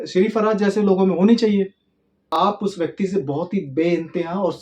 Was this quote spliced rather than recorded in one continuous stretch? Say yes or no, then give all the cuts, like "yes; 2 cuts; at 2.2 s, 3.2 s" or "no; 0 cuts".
yes; 1 cut; at 2.3 s